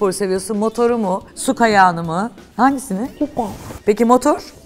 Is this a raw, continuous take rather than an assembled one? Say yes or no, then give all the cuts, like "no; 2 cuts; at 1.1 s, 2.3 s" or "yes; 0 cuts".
no; 1 cut; at 3.7 s